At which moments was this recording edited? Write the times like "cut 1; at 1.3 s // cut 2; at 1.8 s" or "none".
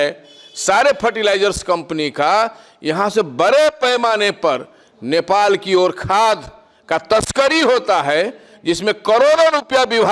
none